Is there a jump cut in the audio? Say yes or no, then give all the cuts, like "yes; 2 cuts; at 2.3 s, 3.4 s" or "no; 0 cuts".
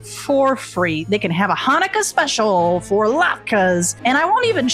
yes; 1 cut; at 1.0 s